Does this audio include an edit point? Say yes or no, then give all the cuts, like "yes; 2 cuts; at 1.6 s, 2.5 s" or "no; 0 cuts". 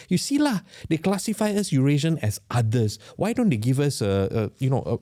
no; 0 cuts